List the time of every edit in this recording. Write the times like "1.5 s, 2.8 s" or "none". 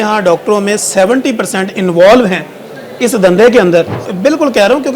4.0 s

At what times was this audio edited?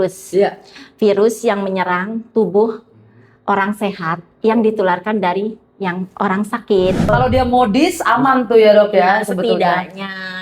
7.1 s

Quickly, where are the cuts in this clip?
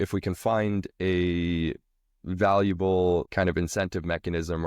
3.3 s

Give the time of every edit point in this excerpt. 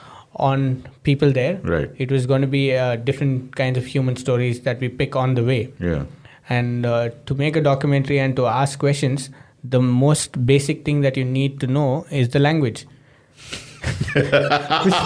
none

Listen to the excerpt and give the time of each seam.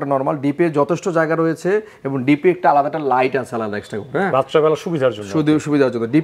none

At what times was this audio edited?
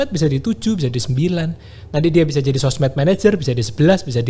none

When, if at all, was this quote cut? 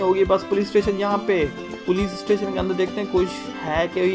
1.7 s

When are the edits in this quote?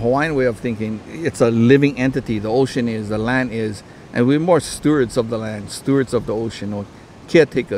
1.0 s

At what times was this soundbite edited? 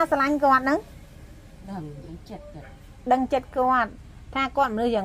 none

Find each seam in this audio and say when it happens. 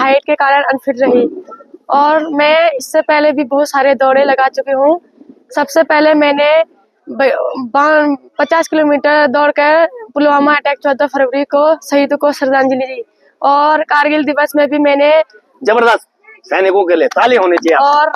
none

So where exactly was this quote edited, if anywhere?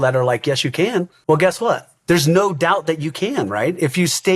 1.1 s, 1.9 s

